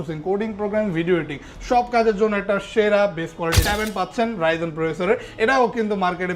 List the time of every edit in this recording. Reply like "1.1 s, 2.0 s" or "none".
3.6 s